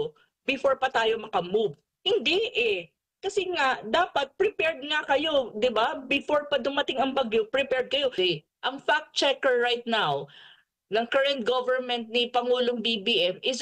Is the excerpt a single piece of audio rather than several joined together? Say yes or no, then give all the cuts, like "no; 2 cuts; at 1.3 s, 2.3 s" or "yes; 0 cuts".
no; 1 cut; at 8.1 s